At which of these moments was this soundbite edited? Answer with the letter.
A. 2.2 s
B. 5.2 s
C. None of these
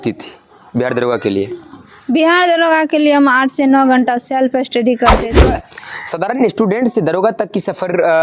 B